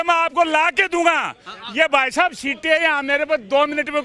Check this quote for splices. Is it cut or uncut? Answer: uncut